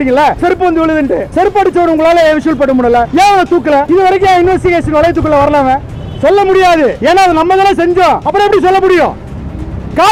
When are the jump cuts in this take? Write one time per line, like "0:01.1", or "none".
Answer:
none